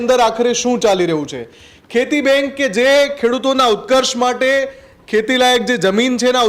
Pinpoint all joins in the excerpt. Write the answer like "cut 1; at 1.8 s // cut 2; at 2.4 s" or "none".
none

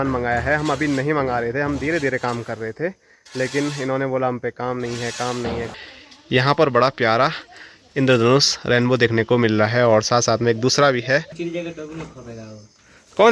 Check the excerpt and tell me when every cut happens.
cut 1; at 5.7 s // cut 2; at 11.4 s

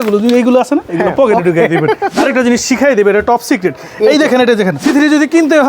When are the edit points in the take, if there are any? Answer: cut 1; at 2.1 s // cut 2; at 4.8 s

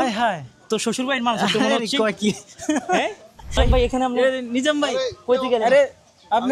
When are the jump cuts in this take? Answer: cut 1; at 3.5 s

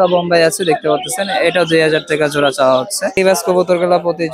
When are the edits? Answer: cut 1; at 3.2 s

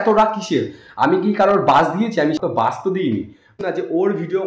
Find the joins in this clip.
cut 1; at 3.5 s

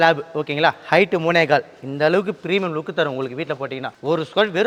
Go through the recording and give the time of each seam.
none

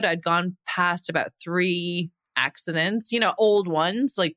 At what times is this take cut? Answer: none

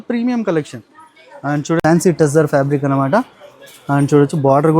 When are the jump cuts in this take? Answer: cut 1; at 1.8 s

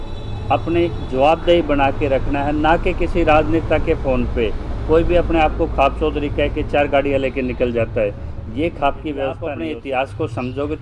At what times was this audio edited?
cut 1; at 9.5 s

